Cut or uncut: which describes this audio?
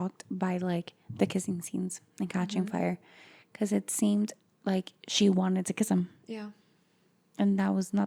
uncut